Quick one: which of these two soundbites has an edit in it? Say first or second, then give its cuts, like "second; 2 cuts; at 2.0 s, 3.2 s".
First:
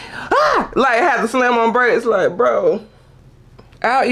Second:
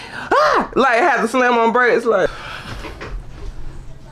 second; 1 cut; at 2.3 s